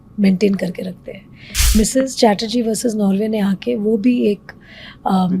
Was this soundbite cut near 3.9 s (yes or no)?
no